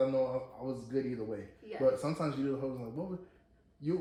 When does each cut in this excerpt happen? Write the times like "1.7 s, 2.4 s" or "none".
none